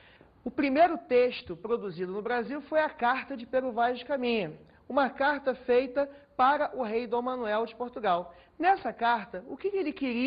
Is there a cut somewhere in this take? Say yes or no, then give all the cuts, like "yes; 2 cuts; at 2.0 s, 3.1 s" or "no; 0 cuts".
no; 0 cuts